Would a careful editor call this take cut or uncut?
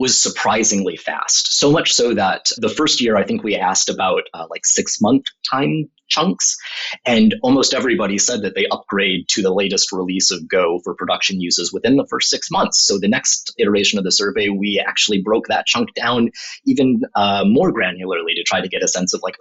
uncut